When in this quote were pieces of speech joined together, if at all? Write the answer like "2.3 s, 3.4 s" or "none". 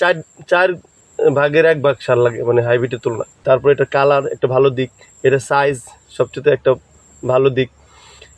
3.4 s

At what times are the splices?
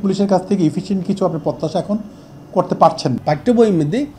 3.2 s

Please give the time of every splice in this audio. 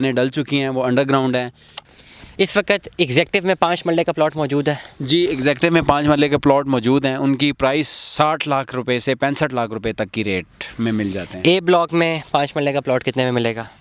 1.7 s

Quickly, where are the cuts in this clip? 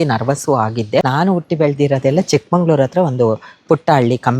1.1 s

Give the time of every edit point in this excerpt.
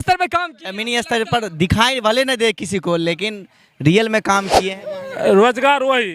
4.6 s

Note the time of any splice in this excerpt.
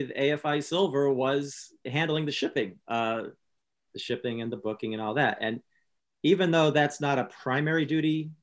1.9 s

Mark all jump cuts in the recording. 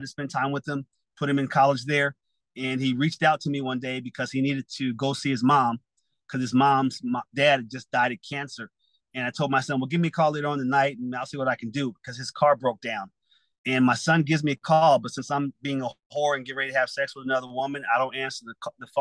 none

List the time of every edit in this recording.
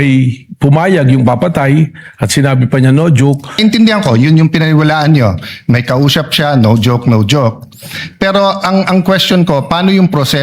3.6 s

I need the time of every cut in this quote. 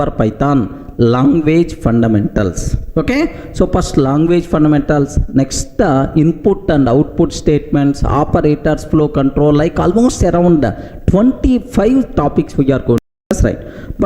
13.1 s

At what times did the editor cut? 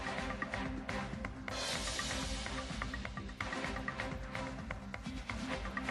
1.3 s

